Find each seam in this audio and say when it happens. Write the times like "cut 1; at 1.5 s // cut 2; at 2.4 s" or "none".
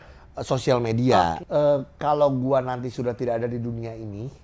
cut 1; at 1.4 s